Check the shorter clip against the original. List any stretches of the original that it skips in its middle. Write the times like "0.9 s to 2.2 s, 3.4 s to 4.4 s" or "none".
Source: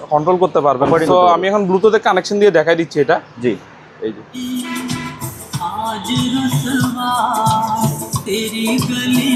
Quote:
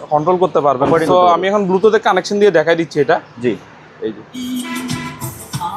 none